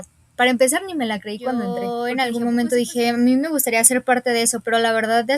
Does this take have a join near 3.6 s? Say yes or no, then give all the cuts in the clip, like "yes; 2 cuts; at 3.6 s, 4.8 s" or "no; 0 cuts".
no; 1 cut; at 1.8 s